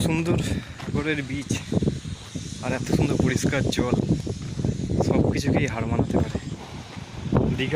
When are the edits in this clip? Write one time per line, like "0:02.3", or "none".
0:01.0
0:06.5